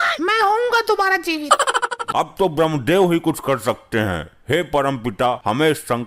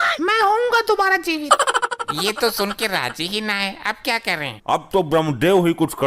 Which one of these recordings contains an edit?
first; 1 cut; at 2.0 s

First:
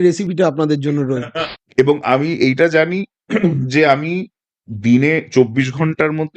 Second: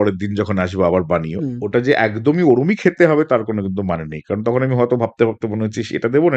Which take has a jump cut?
first; 1 cut; at 1.2 s

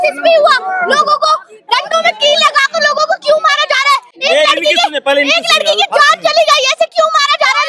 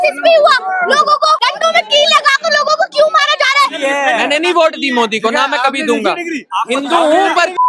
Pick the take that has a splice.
second; 2 cuts; at 1.4 s, 3.8 s

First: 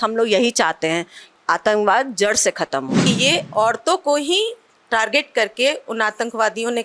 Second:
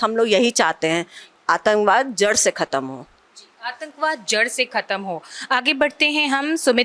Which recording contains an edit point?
first; 1 cut; at 3.0 s

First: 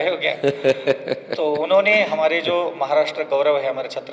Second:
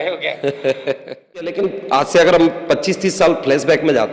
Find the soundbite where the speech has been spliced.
second; 1 cut; at 1.5 s

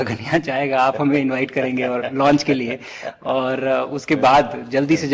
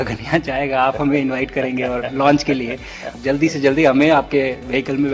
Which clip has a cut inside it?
second; 1 cut; at 3.1 s

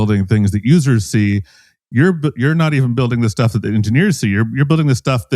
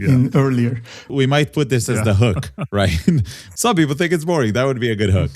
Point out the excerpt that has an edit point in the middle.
second; 2 cuts; at 1.0 s, 3.4 s

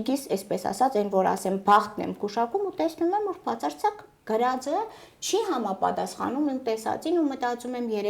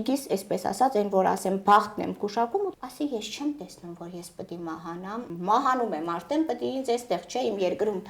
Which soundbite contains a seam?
second; 2 cuts; at 2.7 s, 5.3 s

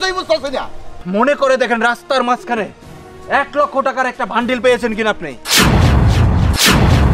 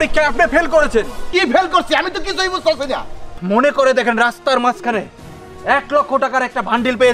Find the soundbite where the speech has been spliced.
second; 1 cut; at 1.2 s

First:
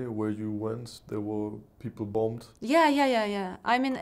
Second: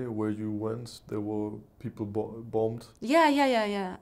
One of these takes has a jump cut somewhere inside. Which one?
first; 1 cut; at 2.1 s

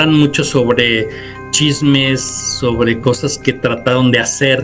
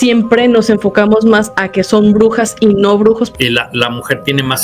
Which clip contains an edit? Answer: second; 1 cut; at 3.3 s

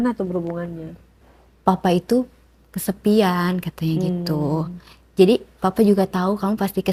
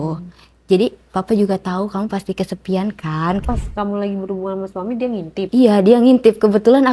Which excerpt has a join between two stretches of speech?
second; 2 cuts; at 3.4 s, 5.5 s

